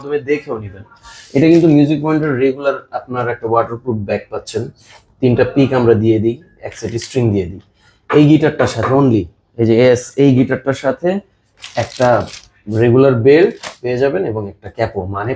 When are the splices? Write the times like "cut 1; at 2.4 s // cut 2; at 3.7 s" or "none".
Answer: none